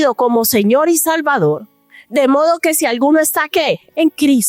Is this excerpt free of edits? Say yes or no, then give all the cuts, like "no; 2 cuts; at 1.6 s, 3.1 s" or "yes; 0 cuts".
yes; 0 cuts